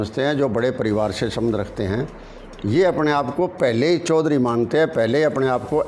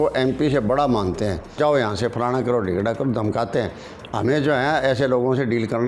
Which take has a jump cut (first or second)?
second